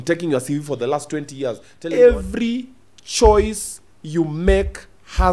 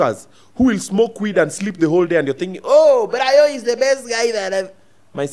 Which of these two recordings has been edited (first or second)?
first